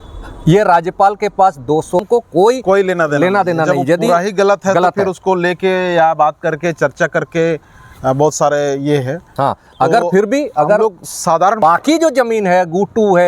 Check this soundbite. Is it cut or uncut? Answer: cut